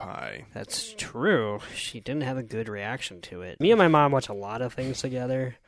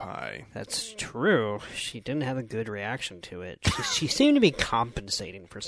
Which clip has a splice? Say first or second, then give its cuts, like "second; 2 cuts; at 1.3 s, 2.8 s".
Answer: first; 1 cut; at 3.6 s